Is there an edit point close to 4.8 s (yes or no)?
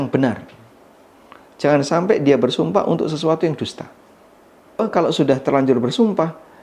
yes